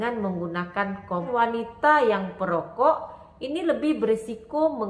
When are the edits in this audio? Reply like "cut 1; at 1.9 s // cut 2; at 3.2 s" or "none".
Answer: cut 1; at 1.3 s